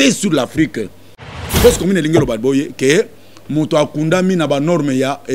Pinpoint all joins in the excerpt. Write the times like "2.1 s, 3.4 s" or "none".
1.2 s